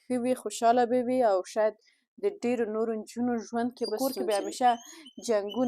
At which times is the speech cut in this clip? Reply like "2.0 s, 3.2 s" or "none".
4.0 s

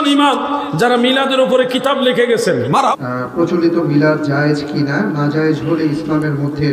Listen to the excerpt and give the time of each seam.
2.9 s

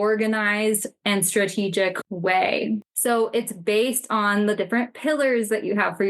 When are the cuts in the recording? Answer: 2.5 s

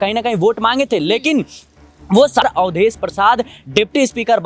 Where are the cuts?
2.4 s

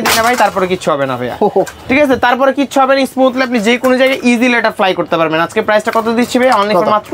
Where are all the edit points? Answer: none

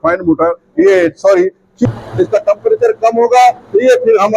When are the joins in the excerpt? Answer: 1.9 s

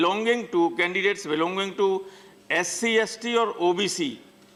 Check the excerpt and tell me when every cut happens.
none

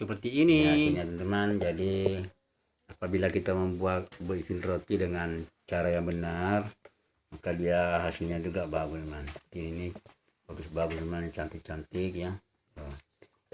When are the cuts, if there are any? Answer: 1.0 s

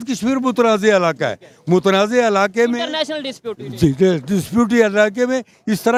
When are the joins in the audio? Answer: none

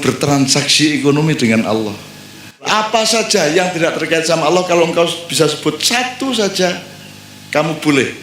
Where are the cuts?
2.7 s

